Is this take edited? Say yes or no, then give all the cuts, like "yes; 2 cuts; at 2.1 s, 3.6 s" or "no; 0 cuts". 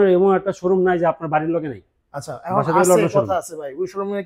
no; 0 cuts